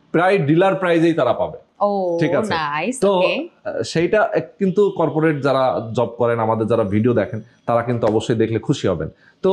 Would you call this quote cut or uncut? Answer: uncut